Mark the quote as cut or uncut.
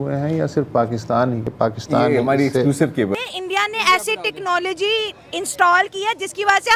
cut